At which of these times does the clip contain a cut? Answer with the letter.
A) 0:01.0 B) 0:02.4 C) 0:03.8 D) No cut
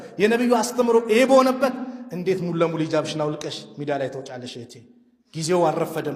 D